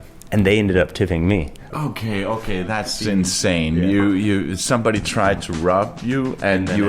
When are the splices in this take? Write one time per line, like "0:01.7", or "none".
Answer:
0:01.7